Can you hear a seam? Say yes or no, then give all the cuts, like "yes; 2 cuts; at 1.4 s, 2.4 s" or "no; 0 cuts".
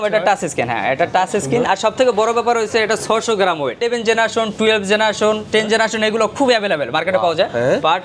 yes; 1 cut; at 3.8 s